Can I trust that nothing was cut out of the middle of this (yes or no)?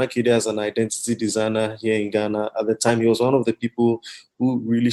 yes